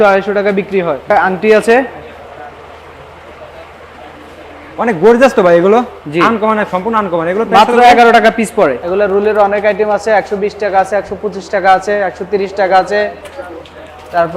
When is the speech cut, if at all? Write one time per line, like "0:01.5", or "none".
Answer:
0:01.1
0:08.8

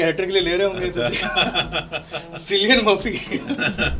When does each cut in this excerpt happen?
none

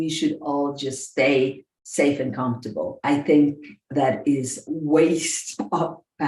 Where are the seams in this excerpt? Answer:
0:03.0
0:04.6

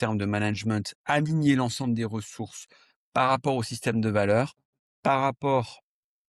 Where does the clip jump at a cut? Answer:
0:00.9

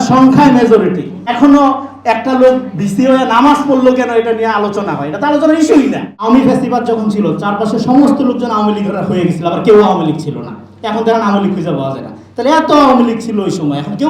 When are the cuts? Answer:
0:01.3
0:06.1

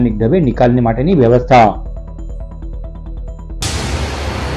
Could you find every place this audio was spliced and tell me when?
0:03.6

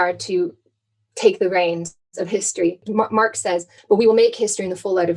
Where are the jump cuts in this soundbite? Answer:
0:03.3

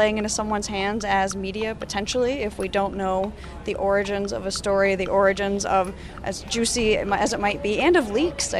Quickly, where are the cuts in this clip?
none

